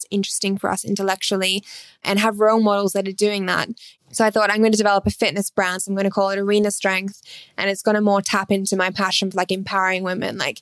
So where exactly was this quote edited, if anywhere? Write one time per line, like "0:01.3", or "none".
0:04.0
0:05.8